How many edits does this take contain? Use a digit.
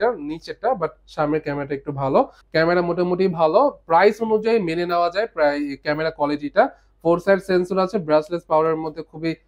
1